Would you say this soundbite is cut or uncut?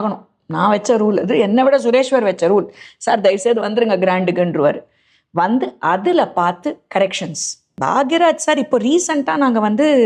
cut